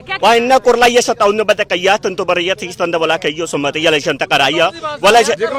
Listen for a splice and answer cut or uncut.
uncut